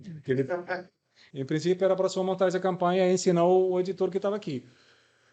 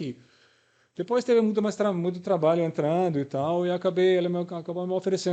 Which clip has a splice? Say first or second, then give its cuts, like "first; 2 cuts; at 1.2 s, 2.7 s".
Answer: first; 1 cut; at 1.3 s